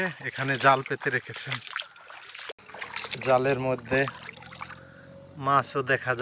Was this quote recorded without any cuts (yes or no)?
no